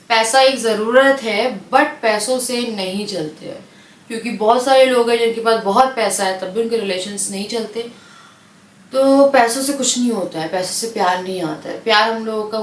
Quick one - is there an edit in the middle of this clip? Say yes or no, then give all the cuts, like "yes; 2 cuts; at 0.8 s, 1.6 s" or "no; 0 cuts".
no; 0 cuts